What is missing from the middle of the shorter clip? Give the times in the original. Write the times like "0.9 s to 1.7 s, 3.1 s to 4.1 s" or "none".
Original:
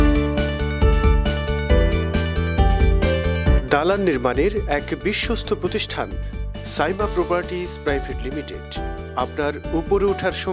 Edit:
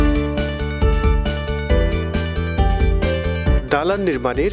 none